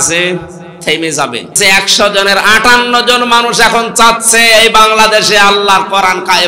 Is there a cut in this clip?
yes; 1 cut; at 1.6 s

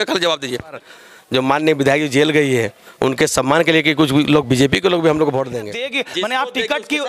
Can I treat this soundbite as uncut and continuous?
no; 2 cuts; at 0.8 s, 5.6 s

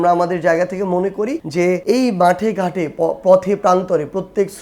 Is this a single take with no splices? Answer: no; 1 cut; at 1.7 s

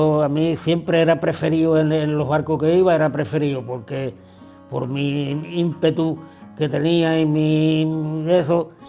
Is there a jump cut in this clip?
no; 0 cuts

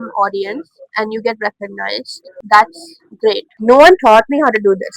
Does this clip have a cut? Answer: yes; 1 cut; at 3.5 s

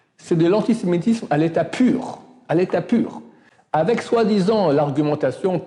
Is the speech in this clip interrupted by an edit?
no; 0 cuts

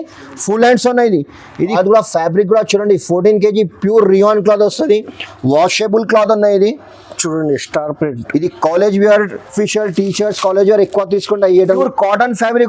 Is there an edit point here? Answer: yes; 3 cuts; at 1.6 s, 9.4 s, 11.7 s

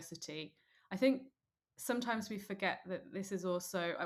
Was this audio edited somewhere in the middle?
no; 0 cuts

